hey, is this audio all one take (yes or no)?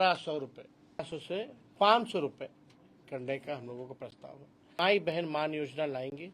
no